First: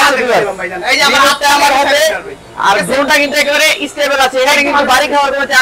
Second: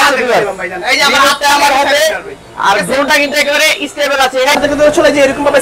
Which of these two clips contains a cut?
second; 1 cut; at 4.6 s

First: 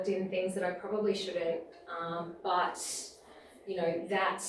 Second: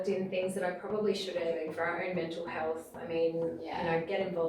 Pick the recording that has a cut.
second; 1 cut; at 1.6 s

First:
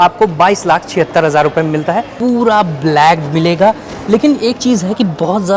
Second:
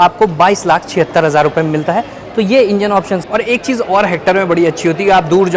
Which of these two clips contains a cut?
first; 1 cut; at 2.1 s

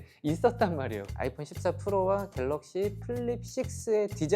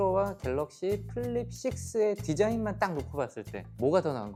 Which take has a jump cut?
first; 1 cut; at 1.0 s

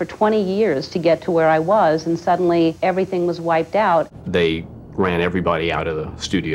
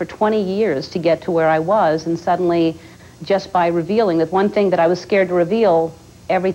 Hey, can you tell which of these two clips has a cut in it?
first; 2 cuts; at 2.8 s, 4.1 s

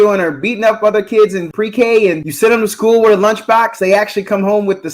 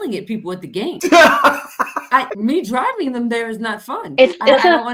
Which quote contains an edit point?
first; 2 cuts; at 1.4 s, 2.3 s

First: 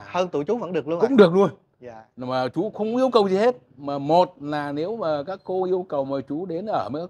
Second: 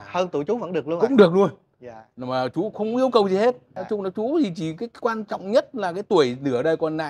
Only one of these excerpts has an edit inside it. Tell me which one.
second; 1 cut; at 3.7 s

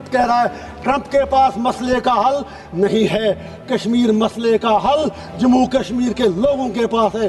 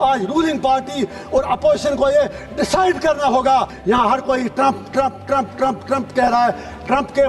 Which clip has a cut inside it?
second; 1 cut; at 3.7 s

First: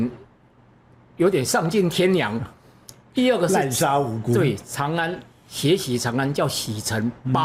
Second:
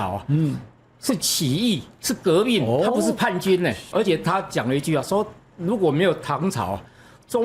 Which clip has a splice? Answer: second; 1 cut; at 3.9 s

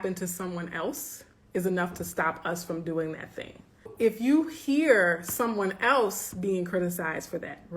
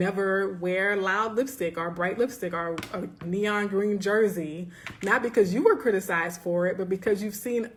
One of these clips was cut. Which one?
first; 1 cut; at 3.9 s

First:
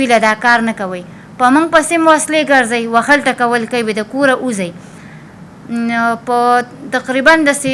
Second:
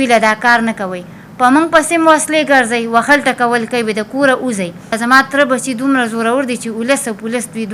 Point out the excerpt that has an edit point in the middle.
second; 1 cut; at 5.0 s

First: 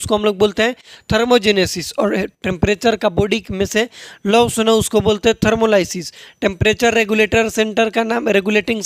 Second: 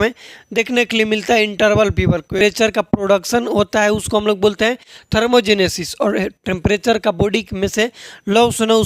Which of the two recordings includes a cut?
second; 1 cut; at 2.4 s

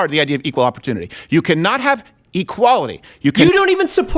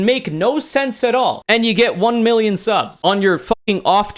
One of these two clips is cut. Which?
second; 2 cuts; at 1.4 s, 2.9 s

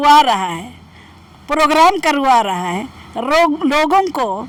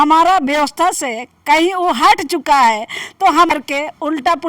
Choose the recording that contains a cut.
second; 1 cut; at 3.5 s

